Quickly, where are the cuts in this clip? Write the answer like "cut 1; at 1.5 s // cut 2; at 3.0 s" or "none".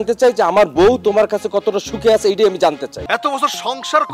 cut 1; at 3.0 s